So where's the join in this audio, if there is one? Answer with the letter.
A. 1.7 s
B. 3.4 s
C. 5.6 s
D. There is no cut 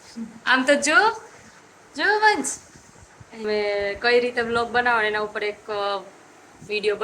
B